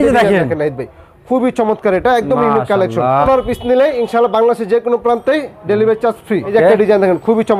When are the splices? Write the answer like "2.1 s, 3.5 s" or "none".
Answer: 3.2 s, 6.5 s